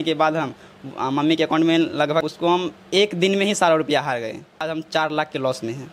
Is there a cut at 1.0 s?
no; 2 cuts; at 2.2 s, 4.8 s

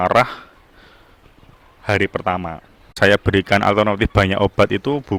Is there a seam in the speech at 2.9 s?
yes; 1 cut; at 2.9 s

